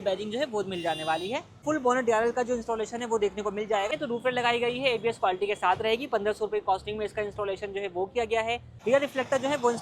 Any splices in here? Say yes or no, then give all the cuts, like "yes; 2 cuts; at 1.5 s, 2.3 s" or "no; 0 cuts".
yes; 3 cuts; at 1.5 s, 3.9 s, 8.7 s